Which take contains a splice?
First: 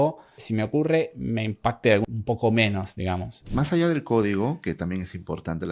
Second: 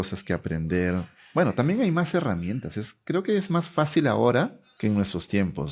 first; 2 cuts; at 2.0 s, 3.5 s

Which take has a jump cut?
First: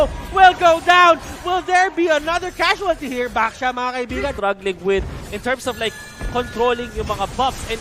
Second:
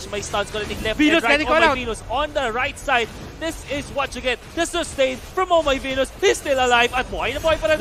first; 1 cut; at 4.4 s

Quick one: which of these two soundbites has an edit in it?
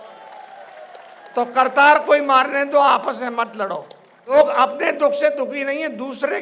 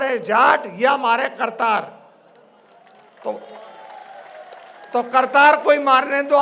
first; 1 cut; at 4.3 s

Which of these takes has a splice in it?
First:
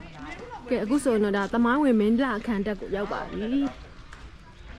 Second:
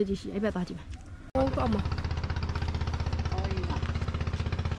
second; 1 cut; at 1.3 s

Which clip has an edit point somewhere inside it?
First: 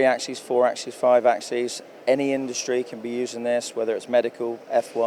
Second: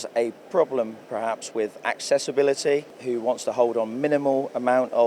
second; 1 cut; at 2.9 s

